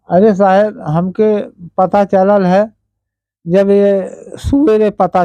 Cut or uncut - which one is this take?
uncut